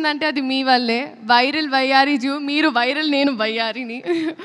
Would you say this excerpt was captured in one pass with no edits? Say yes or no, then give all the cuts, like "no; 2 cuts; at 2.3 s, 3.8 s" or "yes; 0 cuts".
yes; 0 cuts